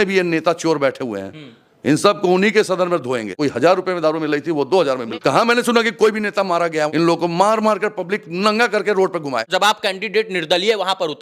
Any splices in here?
yes; 4 cuts; at 3.3 s, 5.1 s, 6.9 s, 9.5 s

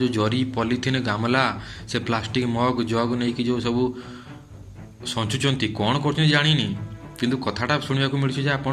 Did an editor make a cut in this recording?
no; 0 cuts

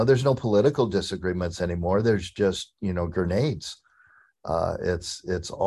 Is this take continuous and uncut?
yes; 0 cuts

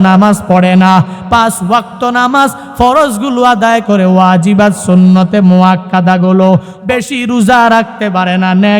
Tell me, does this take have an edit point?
yes; 1 cut; at 6.7 s

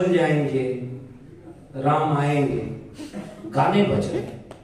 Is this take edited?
no; 0 cuts

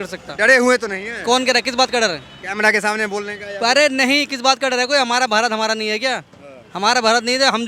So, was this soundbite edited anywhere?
no; 0 cuts

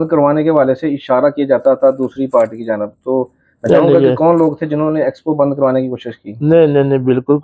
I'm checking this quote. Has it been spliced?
no; 0 cuts

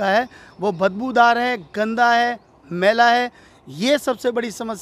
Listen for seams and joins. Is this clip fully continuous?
yes; 0 cuts

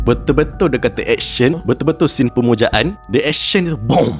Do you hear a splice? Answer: yes; 2 cuts; at 1.6 s, 3.0 s

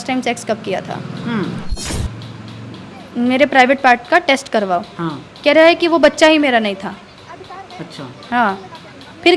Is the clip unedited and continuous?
no; 1 cut; at 1.8 s

